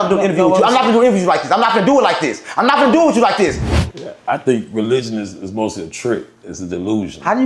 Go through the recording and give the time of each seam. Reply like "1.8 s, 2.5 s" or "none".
3.8 s